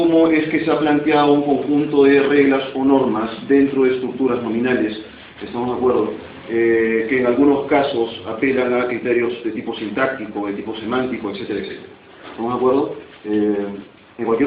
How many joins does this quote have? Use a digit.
0